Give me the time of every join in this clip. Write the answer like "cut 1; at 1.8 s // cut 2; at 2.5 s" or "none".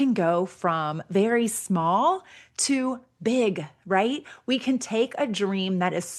none